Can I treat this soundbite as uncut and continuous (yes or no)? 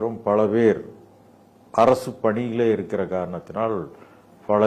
yes